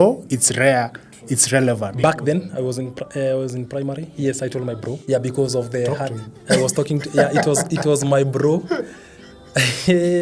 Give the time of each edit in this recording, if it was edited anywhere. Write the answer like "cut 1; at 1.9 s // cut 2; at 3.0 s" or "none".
cut 1; at 5.0 s